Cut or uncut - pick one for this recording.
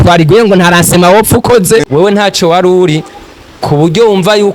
cut